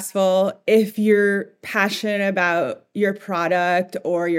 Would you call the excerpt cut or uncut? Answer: uncut